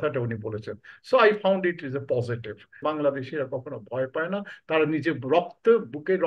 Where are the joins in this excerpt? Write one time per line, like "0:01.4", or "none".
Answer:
0:02.8